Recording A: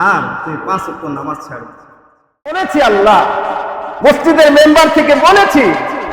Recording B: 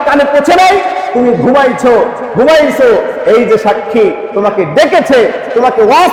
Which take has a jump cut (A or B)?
A